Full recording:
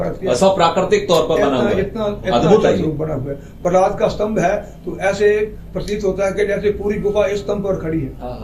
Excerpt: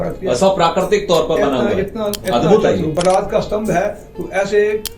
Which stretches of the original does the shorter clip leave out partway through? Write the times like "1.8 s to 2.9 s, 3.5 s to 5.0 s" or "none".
2.9 s to 3.6 s